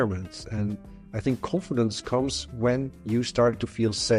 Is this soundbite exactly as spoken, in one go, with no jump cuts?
yes; 0 cuts

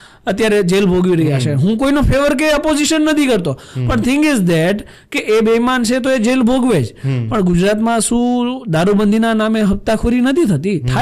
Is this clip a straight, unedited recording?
yes; 0 cuts

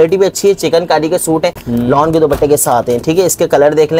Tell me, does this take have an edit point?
no; 0 cuts

